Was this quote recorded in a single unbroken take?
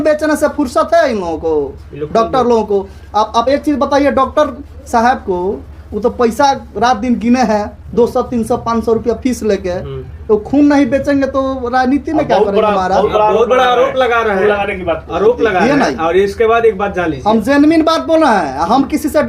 yes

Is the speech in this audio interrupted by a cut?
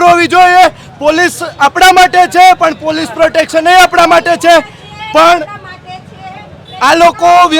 no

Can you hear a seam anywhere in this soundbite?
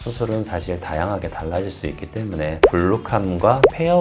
yes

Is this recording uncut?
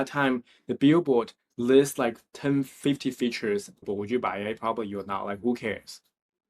no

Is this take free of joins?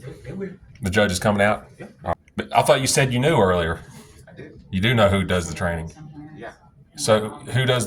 no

